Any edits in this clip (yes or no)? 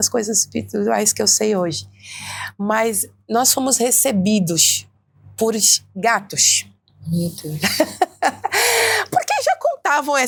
no